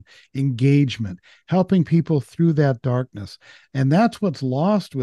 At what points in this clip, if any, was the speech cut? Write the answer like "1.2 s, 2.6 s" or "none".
none